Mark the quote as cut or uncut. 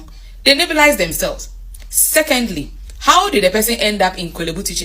uncut